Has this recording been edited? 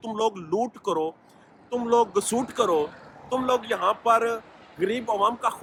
no; 0 cuts

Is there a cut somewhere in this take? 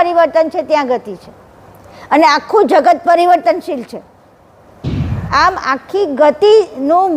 yes; 1 cut; at 5.1 s

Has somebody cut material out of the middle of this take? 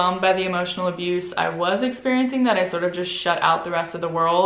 no; 0 cuts

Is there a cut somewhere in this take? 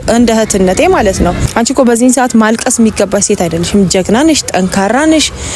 yes; 1 cut; at 1.4 s

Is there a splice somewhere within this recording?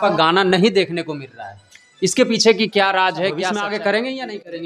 yes; 1 cut; at 3.5 s

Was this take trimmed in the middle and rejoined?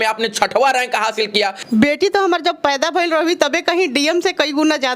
yes; 1 cut; at 1.6 s

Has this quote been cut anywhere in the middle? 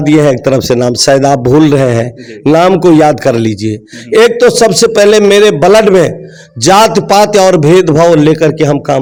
no; 0 cuts

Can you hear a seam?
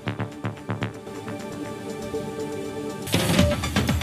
no; 0 cuts

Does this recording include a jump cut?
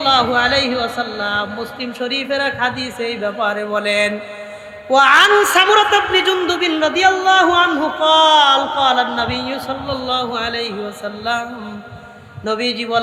no; 0 cuts

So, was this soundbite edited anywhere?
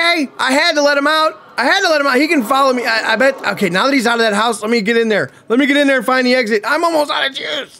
no; 0 cuts

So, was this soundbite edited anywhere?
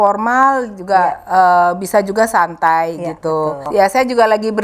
yes; 1 cut; at 3.6 s

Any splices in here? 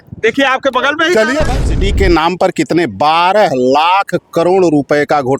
yes; 1 cut; at 1.5 s

